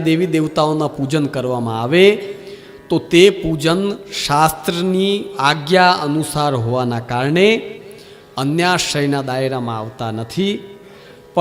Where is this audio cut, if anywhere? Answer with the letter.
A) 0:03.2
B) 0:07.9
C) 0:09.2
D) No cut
D